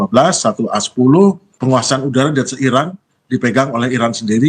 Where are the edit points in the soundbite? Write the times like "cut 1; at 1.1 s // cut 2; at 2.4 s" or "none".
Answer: cut 1; at 1.5 s